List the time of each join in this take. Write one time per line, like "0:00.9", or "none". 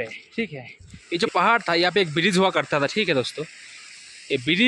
0:00.9